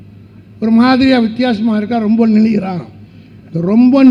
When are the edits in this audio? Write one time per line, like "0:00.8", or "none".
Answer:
none